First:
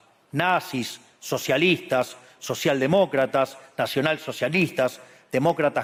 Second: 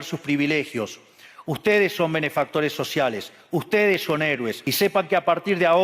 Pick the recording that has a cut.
second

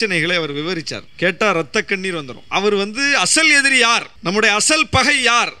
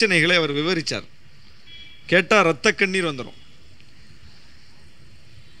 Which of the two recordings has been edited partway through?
first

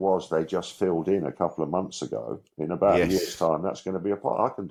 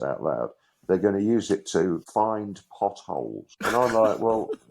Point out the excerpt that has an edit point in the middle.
second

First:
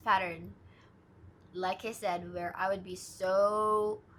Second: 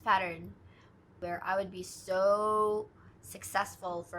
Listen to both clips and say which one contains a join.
second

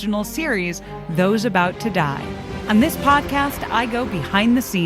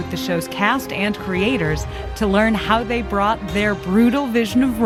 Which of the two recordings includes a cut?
first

